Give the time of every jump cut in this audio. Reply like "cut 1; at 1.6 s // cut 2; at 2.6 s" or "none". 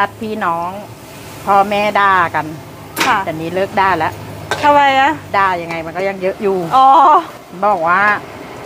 cut 1; at 7.3 s